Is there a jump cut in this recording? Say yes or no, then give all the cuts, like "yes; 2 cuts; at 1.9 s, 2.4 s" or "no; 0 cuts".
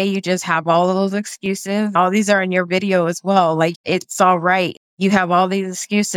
yes; 3 cuts; at 1.9 s, 3.7 s, 4.7 s